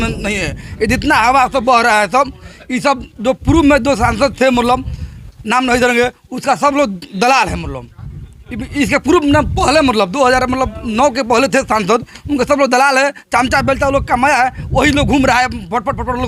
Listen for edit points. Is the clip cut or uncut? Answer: uncut